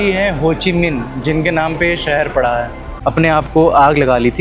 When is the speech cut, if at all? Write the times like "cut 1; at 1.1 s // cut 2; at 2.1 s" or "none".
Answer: cut 1; at 2.8 s